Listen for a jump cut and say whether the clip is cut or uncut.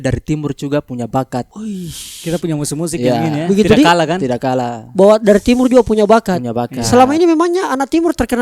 uncut